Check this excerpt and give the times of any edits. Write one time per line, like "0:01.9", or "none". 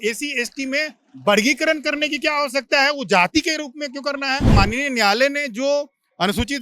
0:04.5